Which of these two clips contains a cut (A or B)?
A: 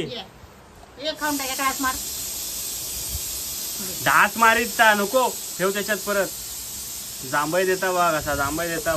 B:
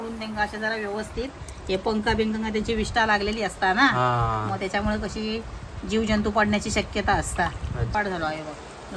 B